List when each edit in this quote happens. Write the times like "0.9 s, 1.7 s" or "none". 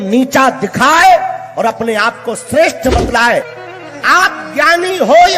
3.6 s